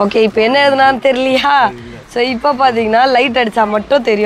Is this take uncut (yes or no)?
yes